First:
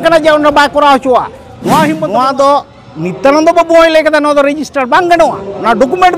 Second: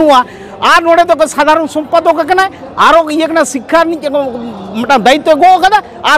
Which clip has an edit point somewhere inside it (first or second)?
first